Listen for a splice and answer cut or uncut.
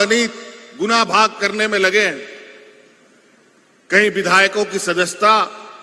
uncut